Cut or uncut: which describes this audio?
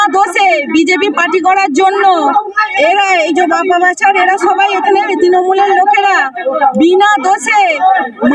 uncut